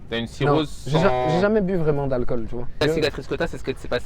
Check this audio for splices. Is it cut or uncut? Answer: cut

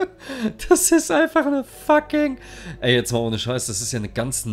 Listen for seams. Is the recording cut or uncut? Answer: uncut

